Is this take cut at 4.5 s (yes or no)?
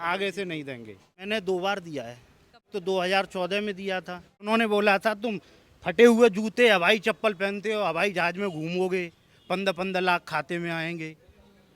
yes